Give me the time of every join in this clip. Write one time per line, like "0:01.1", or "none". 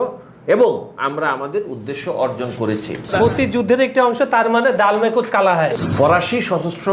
0:03.1
0:05.7